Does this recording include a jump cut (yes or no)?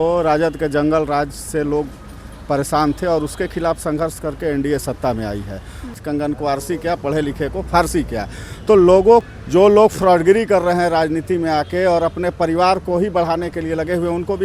yes